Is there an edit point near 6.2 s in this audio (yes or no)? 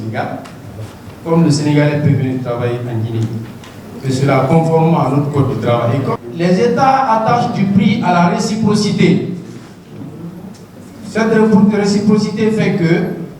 yes